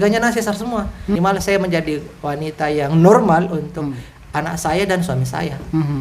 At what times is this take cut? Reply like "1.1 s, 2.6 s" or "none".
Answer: 1.2 s